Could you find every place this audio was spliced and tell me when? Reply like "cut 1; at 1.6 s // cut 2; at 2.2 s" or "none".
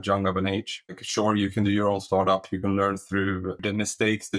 cut 1; at 1.0 s // cut 2; at 3.6 s